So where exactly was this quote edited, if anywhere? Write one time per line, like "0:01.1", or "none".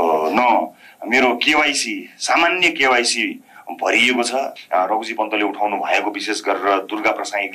0:04.6